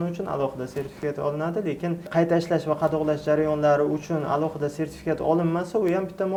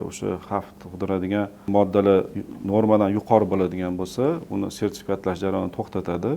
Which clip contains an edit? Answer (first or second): second